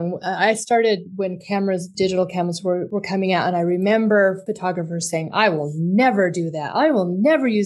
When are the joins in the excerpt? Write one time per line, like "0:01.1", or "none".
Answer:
0:01.9
0:02.9
0:04.5

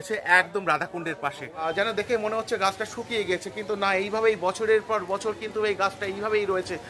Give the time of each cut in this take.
0:01.7

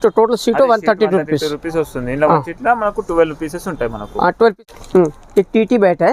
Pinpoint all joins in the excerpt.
0:04.5

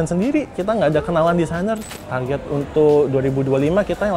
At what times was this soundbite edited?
0:01.9

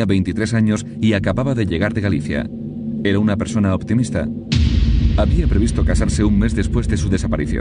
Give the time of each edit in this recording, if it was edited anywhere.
0:03.9

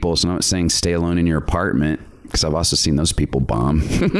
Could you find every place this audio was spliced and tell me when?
none

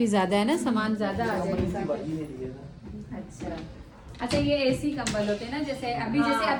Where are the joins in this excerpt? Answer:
none

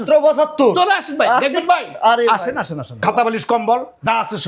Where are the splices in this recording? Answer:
0:03.0

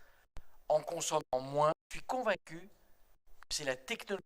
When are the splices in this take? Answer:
0:01.9

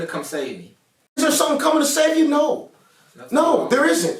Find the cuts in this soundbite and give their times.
0:01.2

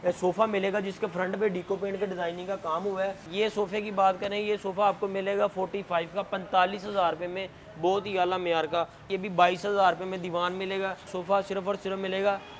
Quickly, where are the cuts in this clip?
0:03.3
0:09.1
0:11.2

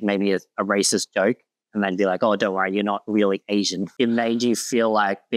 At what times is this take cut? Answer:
none

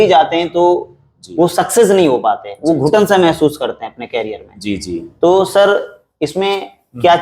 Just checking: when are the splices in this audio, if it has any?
none

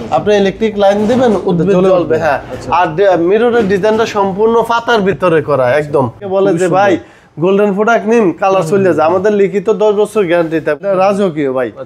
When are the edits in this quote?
0:06.2
0:10.8

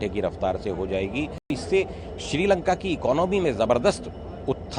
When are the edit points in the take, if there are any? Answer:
0:01.5

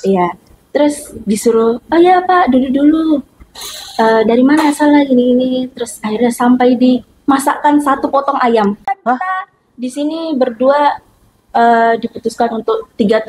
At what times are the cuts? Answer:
0:08.8

